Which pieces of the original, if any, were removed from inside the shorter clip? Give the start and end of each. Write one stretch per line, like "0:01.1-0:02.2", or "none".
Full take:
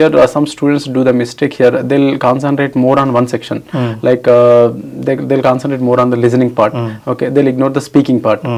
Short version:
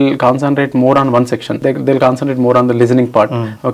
0:03.5-0:04.9